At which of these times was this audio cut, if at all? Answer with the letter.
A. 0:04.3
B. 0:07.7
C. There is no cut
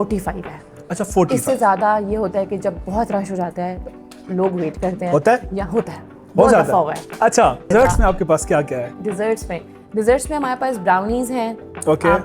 B